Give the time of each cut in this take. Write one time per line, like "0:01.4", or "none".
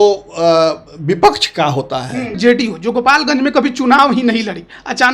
0:02.4